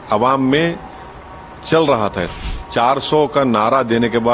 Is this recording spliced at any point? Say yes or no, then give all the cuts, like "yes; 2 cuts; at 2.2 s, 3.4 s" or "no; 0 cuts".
yes; 1 cut; at 2.4 s